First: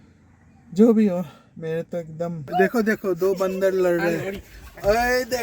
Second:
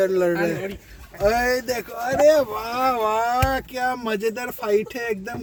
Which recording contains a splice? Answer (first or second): first